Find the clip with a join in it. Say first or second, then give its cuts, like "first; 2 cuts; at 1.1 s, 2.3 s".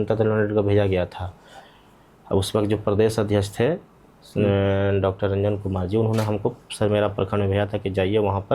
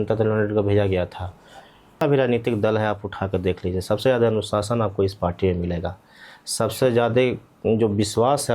second; 1 cut; at 2.0 s